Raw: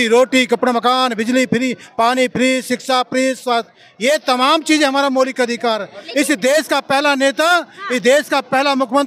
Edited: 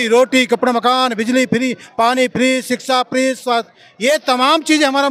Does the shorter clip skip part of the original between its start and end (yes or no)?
no